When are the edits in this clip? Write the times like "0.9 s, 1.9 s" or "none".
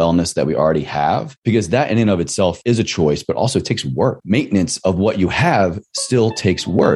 1.3 s, 2.6 s, 4.2 s